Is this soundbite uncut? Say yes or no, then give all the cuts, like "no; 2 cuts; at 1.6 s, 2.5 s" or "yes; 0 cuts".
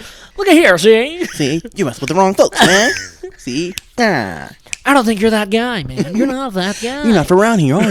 yes; 0 cuts